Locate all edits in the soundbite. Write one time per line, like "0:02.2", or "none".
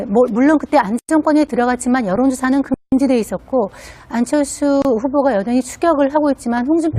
0:02.7